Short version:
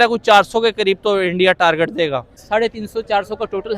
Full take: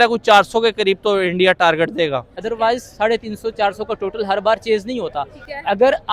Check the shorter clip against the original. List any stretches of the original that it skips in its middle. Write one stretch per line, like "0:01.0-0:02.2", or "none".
0:02.4-0:02.9